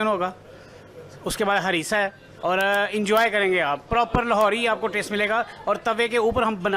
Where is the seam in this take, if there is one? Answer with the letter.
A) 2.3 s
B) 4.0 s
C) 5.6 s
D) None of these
A